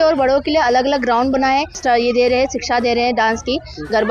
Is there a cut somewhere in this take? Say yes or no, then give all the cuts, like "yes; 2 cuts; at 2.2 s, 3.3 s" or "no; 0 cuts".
yes; 1 cut; at 1.8 s